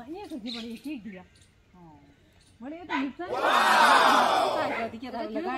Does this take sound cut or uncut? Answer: cut